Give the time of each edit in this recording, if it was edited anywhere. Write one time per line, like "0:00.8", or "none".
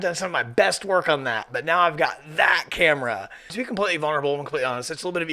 0:03.5